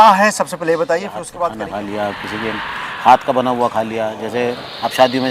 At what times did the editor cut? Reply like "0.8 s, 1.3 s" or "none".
1.6 s